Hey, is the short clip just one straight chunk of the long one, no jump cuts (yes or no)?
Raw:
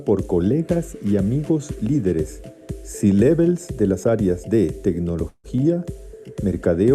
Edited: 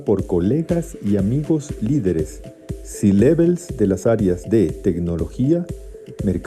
no